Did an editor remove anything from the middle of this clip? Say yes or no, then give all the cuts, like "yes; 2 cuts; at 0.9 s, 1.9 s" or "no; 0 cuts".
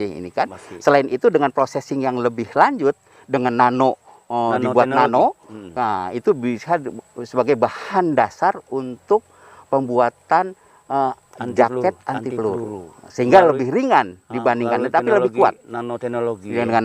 no; 0 cuts